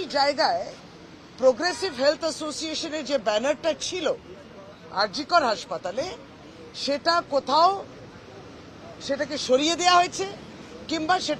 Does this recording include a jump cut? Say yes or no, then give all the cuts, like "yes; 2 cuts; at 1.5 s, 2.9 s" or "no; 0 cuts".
no; 0 cuts